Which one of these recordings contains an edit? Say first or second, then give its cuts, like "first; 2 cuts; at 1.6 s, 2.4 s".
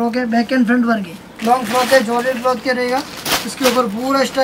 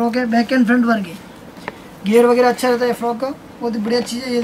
first; 1 cut; at 1.2 s